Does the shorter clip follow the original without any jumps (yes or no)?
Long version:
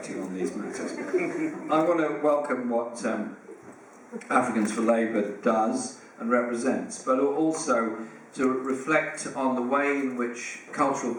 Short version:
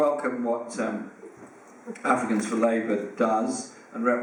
yes